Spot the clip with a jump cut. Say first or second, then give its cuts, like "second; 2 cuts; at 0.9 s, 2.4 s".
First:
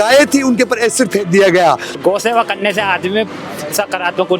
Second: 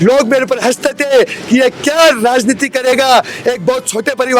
first; 1 cut; at 2.0 s